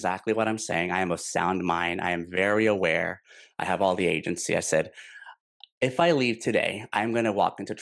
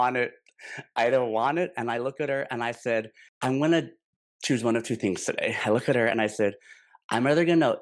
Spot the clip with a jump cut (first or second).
second